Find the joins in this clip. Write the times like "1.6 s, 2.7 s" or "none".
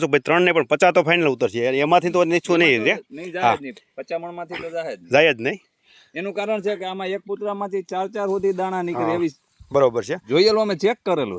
none